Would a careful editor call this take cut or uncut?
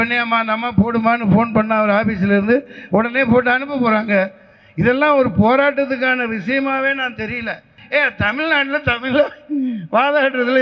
cut